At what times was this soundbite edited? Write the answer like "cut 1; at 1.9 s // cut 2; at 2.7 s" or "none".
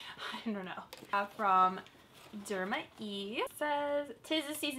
cut 1; at 1.1 s // cut 2; at 3.5 s